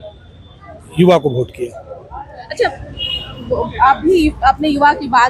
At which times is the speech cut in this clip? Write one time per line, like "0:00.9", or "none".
none

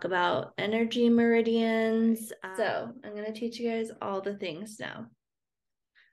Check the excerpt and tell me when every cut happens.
0:02.3

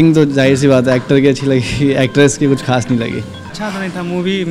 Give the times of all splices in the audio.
0:03.4

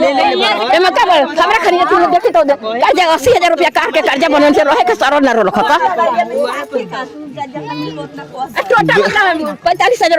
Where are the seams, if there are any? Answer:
none

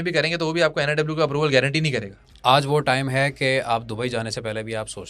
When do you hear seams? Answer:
0:02.2

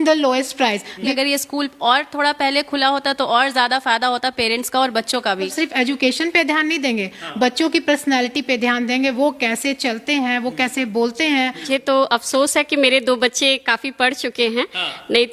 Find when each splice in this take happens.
0:01.1
0:05.5
0:11.7

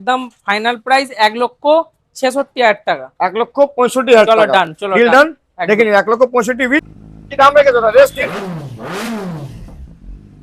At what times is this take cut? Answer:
0:07.0

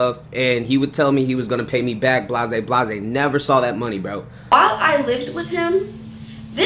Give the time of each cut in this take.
0:04.5

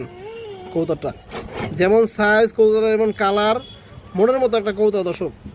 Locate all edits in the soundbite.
none

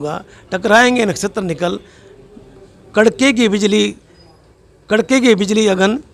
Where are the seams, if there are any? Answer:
none

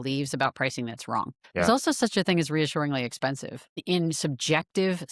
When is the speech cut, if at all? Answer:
0:01.4
0:03.8

